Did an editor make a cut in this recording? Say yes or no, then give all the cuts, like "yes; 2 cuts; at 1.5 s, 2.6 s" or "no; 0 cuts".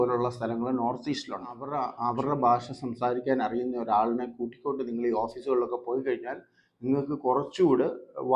yes; 1 cut; at 1.8 s